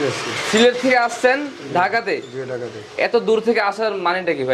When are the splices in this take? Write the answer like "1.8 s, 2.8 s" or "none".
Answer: none